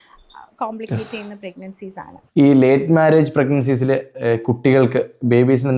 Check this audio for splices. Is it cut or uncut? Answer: cut